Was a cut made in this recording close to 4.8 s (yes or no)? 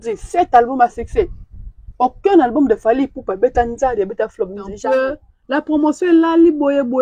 yes